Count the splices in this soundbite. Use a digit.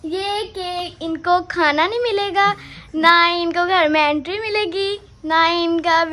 0